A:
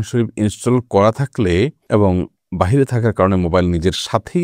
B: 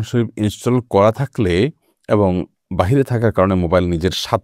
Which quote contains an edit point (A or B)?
A